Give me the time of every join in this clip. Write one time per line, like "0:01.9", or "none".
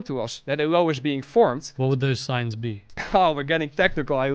0:01.7
0:02.9